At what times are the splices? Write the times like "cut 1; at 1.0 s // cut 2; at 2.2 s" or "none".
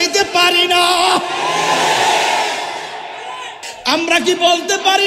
cut 1; at 3.7 s